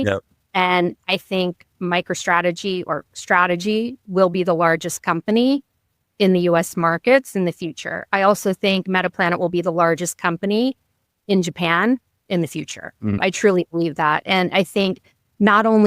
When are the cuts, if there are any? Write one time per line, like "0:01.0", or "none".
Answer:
0:13.2